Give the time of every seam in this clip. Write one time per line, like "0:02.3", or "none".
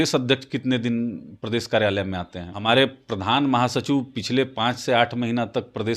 0:02.5